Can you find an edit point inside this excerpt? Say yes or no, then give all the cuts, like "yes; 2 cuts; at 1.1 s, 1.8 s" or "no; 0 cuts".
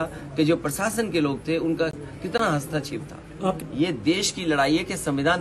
yes; 1 cut; at 3.6 s